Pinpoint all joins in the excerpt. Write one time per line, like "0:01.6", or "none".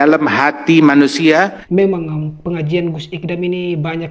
0:01.6